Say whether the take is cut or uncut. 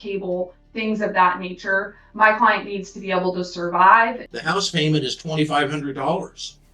cut